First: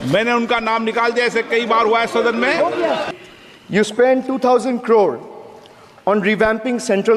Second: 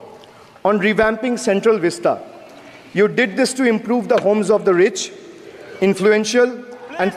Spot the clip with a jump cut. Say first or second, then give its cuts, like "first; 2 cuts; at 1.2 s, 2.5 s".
first; 1 cut; at 3.0 s